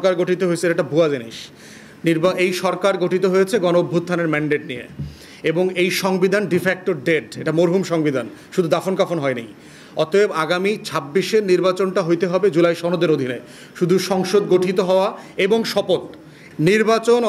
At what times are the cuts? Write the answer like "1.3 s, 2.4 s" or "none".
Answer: 16.3 s